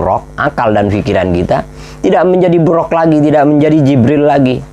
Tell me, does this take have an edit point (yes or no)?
no